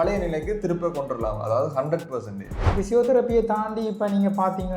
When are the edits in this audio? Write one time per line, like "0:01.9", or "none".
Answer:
0:02.7